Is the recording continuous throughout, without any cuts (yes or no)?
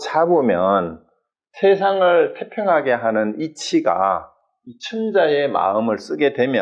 yes